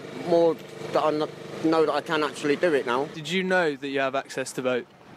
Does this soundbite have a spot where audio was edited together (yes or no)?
no